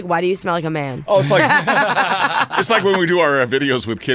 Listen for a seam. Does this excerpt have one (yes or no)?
no